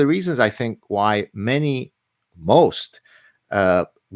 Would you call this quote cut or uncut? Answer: uncut